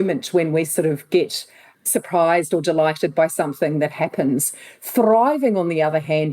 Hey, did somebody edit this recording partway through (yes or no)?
yes